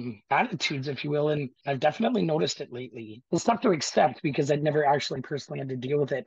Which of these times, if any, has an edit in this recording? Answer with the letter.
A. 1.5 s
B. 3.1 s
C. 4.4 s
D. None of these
B